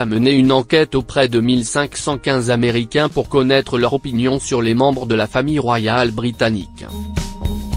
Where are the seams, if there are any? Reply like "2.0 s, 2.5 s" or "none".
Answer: 6.9 s